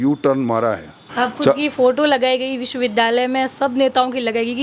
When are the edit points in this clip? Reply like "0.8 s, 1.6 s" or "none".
1.1 s